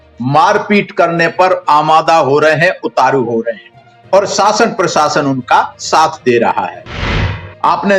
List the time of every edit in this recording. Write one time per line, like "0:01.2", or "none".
0:07.1